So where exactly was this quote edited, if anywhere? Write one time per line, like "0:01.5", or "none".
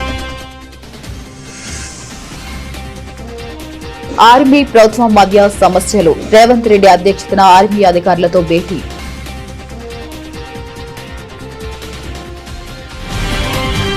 0:01.8
0:08.9
0:10.6